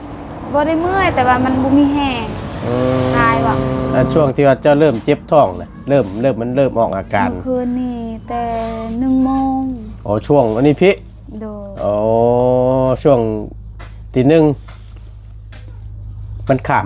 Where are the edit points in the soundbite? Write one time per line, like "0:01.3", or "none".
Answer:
0:03.9